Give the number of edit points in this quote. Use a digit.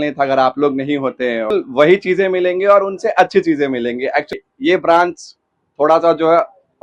2